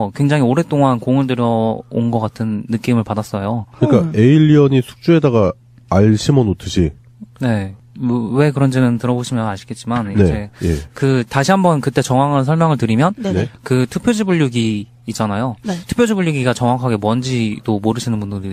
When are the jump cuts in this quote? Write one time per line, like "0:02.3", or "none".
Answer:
none